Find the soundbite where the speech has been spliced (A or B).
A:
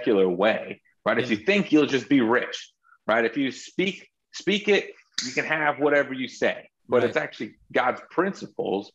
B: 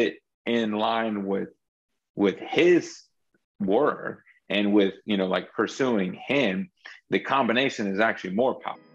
A